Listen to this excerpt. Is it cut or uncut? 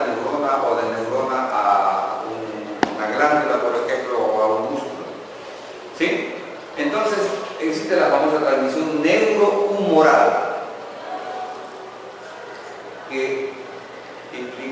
cut